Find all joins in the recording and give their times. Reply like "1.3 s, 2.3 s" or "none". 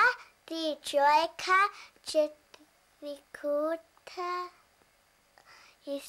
none